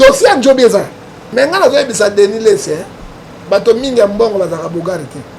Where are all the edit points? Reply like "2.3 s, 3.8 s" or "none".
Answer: 1.3 s